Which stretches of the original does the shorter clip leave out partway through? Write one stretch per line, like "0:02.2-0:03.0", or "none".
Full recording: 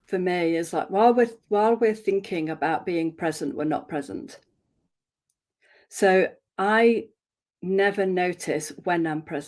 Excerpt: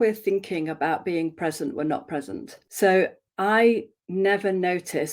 0:04.4-0:05.8
0:07.2-0:07.5